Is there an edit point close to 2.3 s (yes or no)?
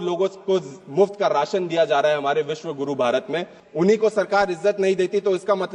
no